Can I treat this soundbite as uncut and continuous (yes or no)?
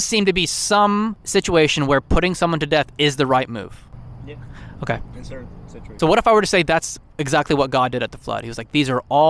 no